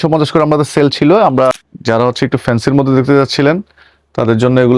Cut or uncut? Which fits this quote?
cut